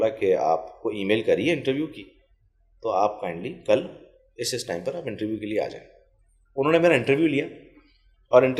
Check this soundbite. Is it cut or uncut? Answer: cut